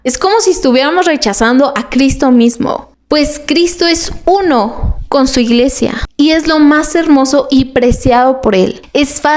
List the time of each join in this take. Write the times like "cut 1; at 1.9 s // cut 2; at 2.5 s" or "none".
none